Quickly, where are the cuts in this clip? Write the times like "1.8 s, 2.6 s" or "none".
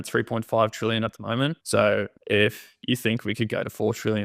1.6 s, 2.2 s

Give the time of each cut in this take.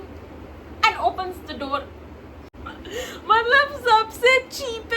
2.5 s

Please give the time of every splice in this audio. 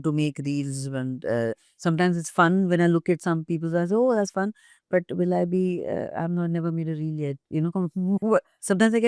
none

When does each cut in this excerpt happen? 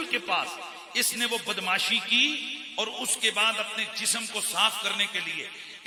none

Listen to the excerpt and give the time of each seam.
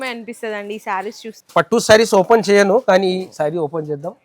1.3 s

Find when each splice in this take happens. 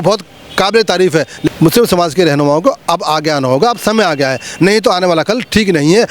1.5 s

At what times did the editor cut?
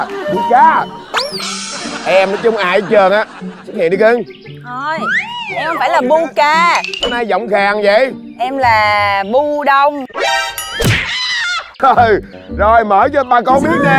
11.7 s

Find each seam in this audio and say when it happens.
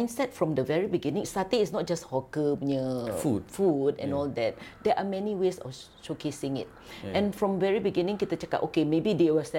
none

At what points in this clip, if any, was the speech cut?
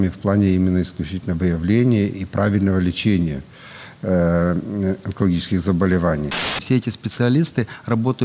6.6 s

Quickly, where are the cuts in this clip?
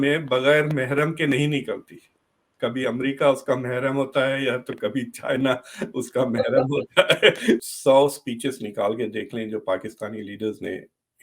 7.6 s

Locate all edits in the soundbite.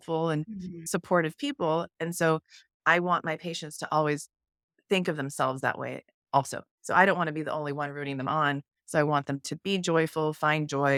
none

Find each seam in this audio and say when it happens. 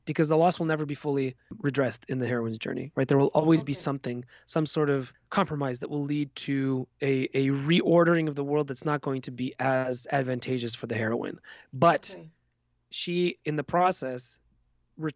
1.5 s, 5.2 s

